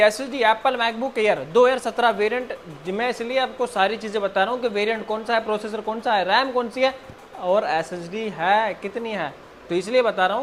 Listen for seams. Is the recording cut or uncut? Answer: uncut